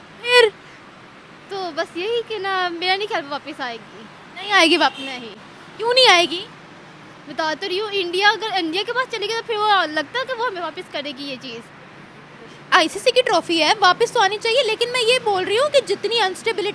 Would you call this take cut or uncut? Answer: uncut